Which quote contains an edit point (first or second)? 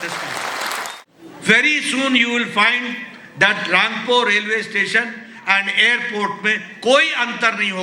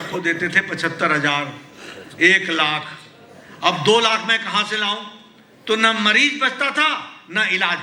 first